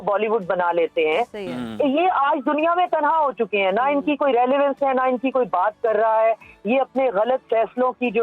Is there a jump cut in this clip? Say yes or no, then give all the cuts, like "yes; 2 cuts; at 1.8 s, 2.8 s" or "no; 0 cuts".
no; 0 cuts